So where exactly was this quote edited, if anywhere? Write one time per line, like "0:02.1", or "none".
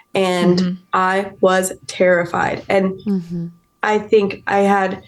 none

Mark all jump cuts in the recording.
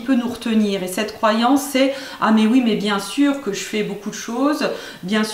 none

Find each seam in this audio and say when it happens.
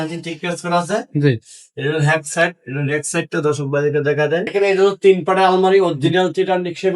0:04.5

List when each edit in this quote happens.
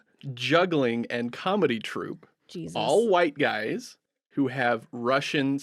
none

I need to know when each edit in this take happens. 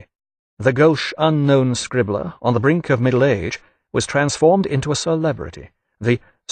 none

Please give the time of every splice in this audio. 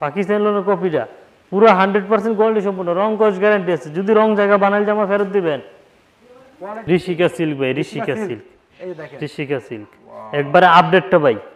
0:06.7

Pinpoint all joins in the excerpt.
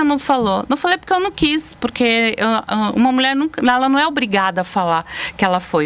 none

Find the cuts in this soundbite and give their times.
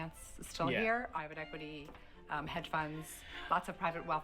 0:01.1

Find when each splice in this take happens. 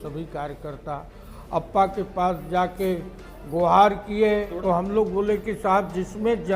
0:04.5

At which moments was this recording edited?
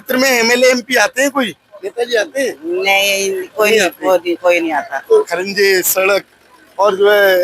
0:05.3

